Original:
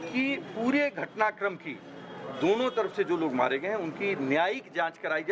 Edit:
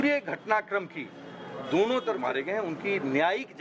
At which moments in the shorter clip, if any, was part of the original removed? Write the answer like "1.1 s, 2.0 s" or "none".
2.2 s

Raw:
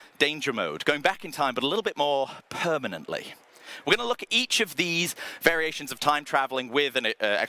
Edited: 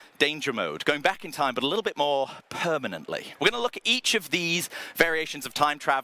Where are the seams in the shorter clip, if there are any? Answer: 3.3 s

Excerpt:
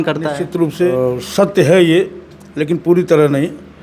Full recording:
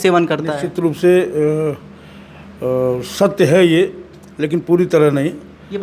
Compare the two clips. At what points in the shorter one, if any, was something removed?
0.9 s

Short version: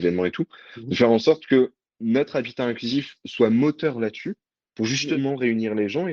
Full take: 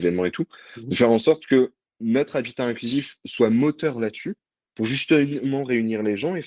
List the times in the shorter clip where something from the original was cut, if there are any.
5.1 s

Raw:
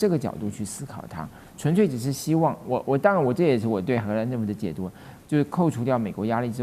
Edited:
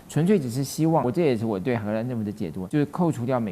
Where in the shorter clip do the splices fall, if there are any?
1.0 s, 2.6 s

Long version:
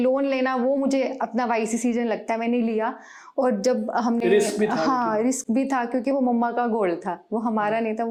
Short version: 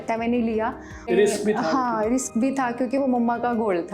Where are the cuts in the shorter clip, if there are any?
1.1 s

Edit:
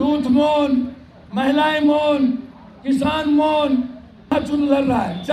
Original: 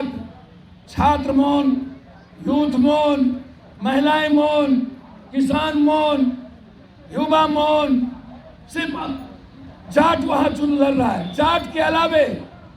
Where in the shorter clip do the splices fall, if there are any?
4.3 s

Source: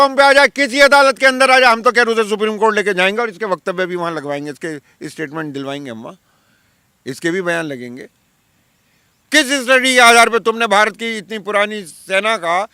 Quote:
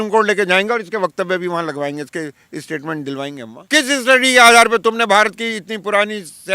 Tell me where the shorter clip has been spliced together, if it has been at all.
3.5 s

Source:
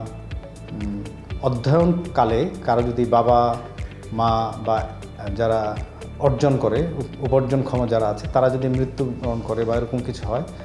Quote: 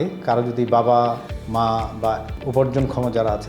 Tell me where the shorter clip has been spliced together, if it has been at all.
1.3 s, 2.3 s

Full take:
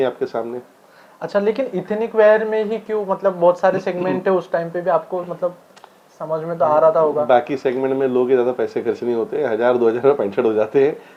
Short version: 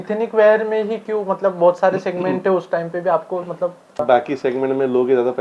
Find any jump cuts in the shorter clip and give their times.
4.0 s

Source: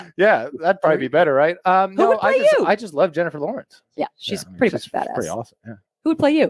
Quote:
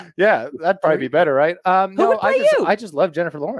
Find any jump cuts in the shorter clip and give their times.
none

